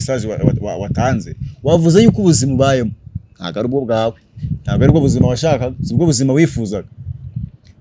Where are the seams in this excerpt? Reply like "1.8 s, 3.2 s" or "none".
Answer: none